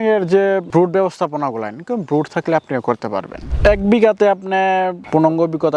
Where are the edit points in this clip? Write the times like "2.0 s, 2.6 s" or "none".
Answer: 3.4 s

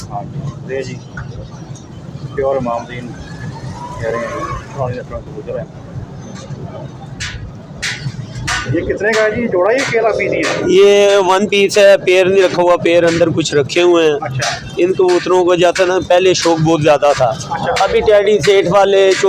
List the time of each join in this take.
none

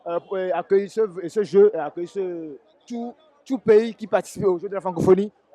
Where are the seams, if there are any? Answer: none

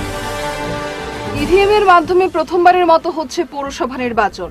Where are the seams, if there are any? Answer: 1.3 s

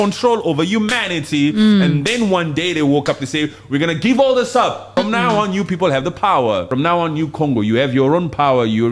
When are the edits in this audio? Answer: 4.9 s, 6.7 s

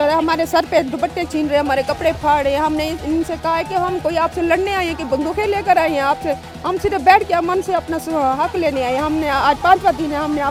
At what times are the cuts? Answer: none

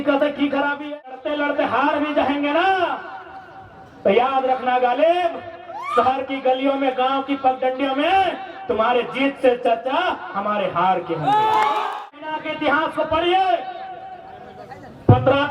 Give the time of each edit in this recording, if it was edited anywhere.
1.2 s, 12.1 s

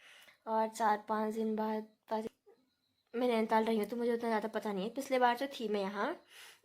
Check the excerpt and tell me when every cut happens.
2.3 s

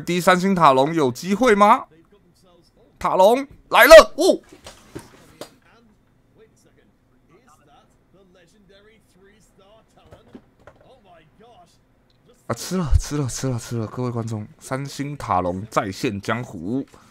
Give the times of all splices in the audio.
none

